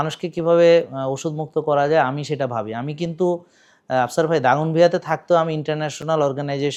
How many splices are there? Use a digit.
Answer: 0